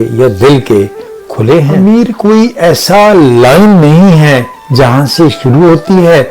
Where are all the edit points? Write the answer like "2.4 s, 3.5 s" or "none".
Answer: 1.7 s

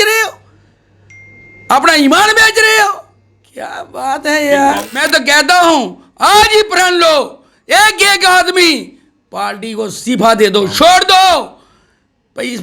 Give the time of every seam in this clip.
5.0 s

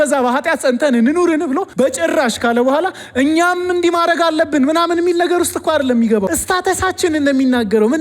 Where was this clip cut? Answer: 1.7 s, 6.3 s

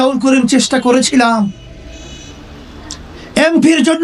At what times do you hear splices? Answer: none

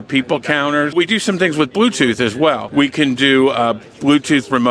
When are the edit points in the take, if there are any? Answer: 0.9 s, 2.6 s

